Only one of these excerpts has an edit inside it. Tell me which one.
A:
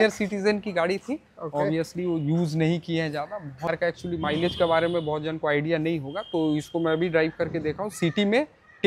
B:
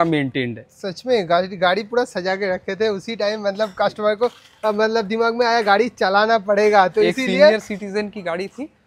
A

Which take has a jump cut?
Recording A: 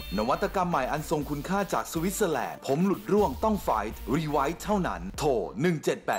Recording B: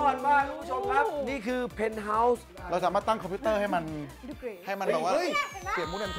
B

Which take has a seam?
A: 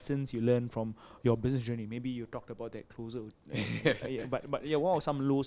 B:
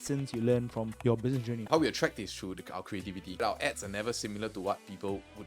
B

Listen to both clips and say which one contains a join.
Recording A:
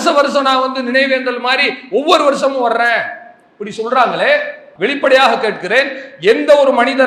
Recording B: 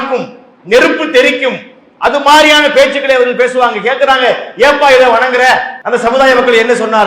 B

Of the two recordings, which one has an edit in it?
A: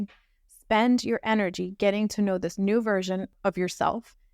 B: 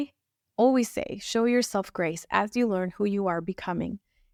A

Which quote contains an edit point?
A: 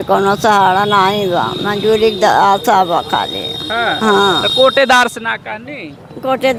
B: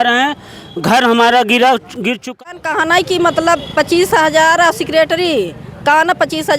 B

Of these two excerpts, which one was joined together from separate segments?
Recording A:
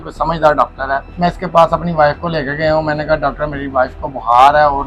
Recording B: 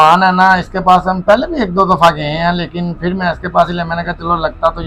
A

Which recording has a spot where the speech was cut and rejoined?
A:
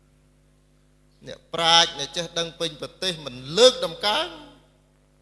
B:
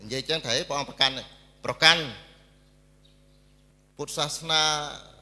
B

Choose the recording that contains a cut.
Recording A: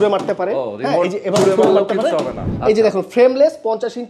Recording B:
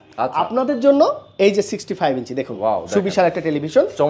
A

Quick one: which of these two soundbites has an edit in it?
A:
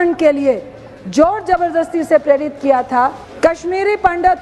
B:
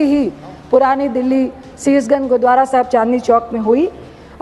A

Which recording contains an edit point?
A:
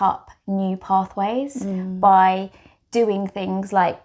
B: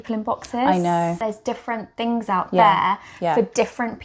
B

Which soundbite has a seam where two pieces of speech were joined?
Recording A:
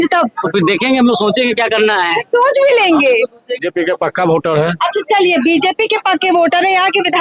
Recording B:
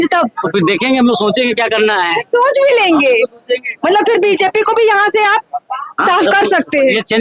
A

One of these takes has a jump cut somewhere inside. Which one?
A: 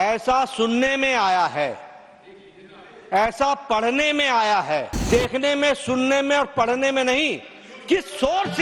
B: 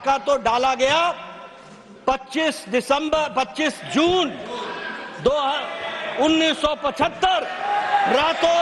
A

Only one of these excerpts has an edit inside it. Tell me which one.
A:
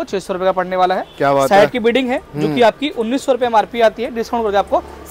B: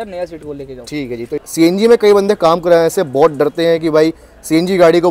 B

